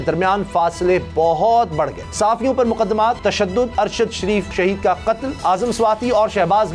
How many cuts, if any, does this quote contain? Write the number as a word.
four